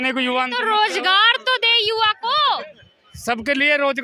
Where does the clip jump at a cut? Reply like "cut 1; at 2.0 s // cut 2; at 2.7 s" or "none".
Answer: none